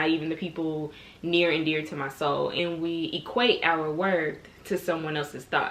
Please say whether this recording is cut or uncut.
cut